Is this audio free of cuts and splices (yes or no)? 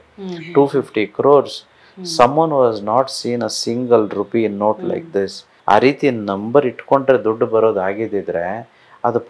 no